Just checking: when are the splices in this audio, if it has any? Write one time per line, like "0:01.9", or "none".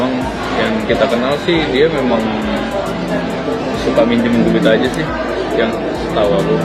none